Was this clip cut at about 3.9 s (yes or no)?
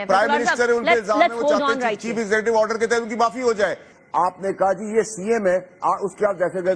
yes